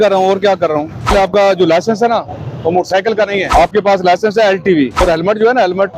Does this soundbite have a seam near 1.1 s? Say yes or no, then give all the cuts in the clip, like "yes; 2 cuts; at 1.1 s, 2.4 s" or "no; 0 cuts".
yes; 3 cuts; at 1.1 s, 3.5 s, 5.0 s